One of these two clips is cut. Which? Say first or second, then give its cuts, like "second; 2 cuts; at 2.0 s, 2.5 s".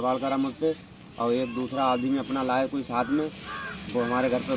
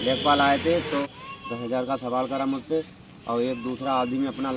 second; 1 cut; at 1.0 s